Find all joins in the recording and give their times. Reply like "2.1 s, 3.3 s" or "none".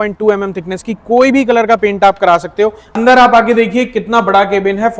2.9 s